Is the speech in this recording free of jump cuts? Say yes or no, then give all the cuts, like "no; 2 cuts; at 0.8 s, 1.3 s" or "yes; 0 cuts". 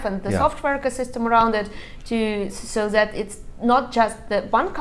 yes; 0 cuts